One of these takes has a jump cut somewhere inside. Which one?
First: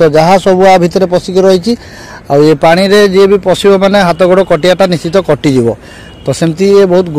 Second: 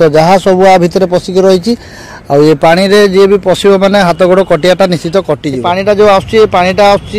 second; 1 cut; at 5.5 s

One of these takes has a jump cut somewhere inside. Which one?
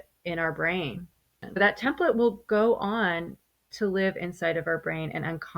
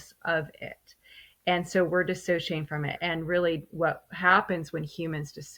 first; 1 cut; at 1.4 s

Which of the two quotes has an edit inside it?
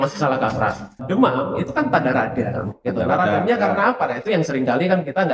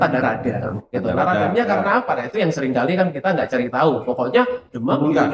first; 1 cut; at 1.0 s

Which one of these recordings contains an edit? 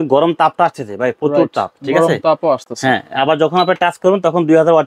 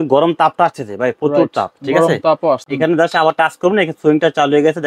second; 1 cut; at 2.7 s

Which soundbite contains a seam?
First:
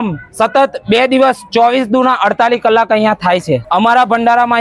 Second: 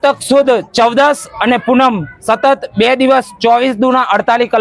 first; 1 cut; at 3.6 s

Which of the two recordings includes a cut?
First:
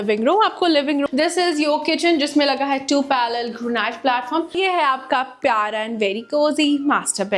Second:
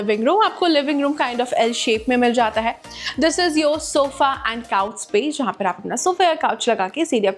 first; 2 cuts; at 1.1 s, 4.5 s

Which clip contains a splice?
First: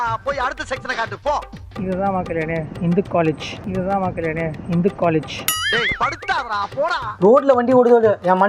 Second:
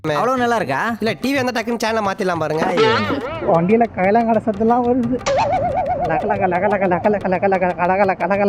first; 2 cuts; at 1.7 s, 7.1 s

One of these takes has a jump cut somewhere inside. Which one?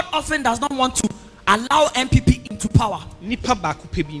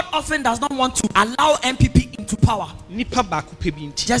second; 1 cut; at 1.1 s

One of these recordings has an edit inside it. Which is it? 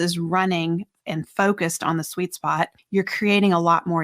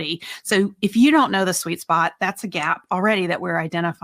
first; 1 cut; at 2.8 s

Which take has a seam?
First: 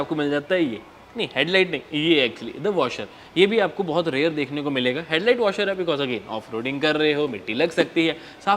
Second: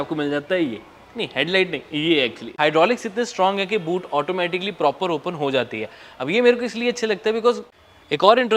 second; 2 cuts; at 2.4 s, 7.7 s

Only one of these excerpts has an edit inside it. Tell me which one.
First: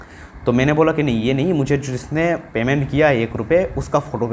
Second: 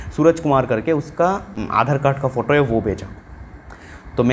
second; 1 cut; at 1.0 s

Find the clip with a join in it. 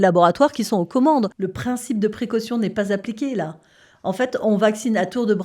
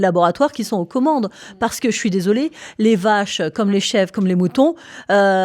first; 1 cut; at 1.4 s

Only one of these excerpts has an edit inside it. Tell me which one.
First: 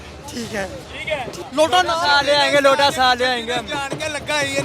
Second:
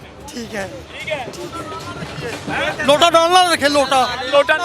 first; 1 cut; at 1.4 s

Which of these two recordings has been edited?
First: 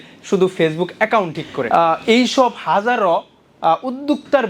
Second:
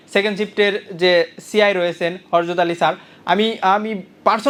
first; 1 cut; at 1.6 s

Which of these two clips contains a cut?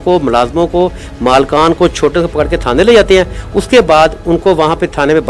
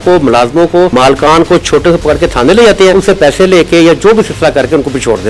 second; 2 cuts; at 0.9 s, 2.9 s

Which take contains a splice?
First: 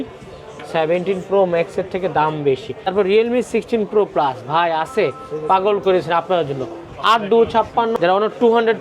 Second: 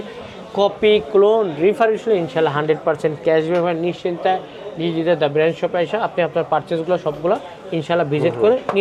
first; 2 cuts; at 2.9 s, 7.9 s

